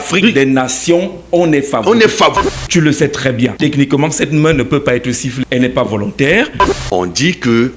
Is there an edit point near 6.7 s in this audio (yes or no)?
yes